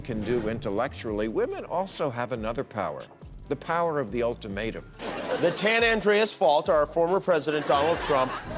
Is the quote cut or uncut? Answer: cut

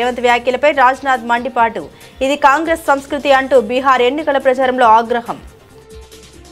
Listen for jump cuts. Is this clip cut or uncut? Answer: cut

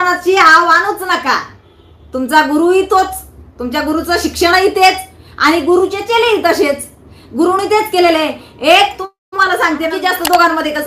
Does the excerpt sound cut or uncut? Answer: cut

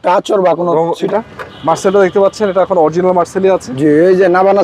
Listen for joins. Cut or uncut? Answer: cut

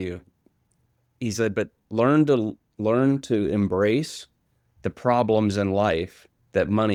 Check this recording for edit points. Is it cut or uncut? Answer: uncut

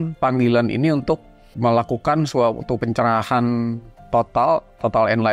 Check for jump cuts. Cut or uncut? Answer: cut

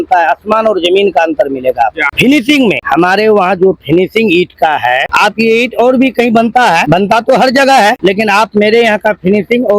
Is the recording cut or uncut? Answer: cut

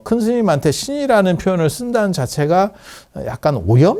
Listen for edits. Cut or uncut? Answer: uncut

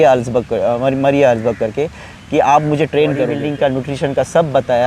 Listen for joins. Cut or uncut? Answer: cut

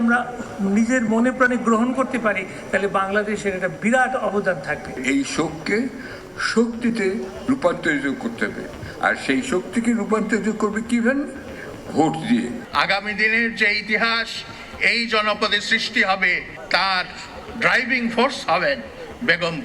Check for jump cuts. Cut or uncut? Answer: cut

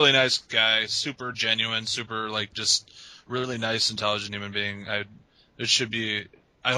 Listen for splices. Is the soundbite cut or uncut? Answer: cut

